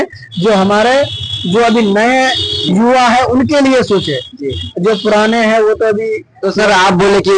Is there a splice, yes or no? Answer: no